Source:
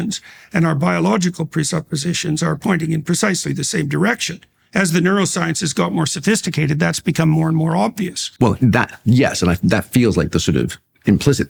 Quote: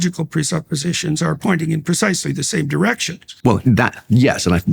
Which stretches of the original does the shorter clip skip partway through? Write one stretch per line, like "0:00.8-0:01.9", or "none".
0:04.5-0:08.2